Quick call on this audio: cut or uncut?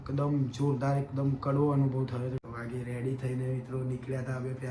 cut